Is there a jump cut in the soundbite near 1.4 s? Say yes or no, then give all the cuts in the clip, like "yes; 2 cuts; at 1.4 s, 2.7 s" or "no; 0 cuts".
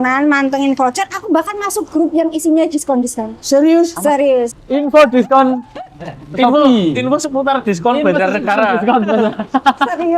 no; 1 cut; at 4.5 s